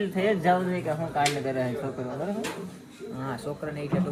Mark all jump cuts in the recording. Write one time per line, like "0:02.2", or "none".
none